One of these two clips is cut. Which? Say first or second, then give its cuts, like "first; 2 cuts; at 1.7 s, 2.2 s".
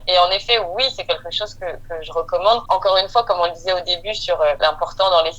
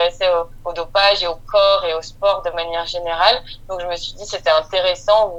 first; 2 cuts; at 2.6 s, 4.6 s